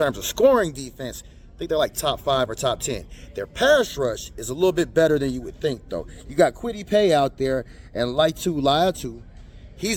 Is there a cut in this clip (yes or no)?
no